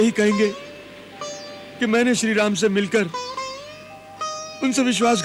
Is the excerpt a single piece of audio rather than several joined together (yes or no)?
yes